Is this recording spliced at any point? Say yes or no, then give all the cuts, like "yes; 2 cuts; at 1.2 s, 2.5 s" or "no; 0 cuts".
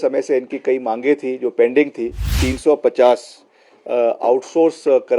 yes; 1 cut; at 2.4 s